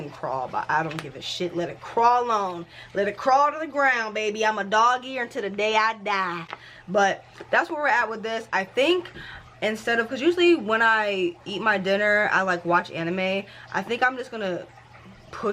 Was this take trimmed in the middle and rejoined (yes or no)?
no